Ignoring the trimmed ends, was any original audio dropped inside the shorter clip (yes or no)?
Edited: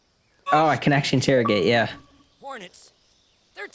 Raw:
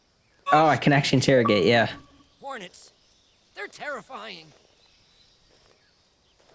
no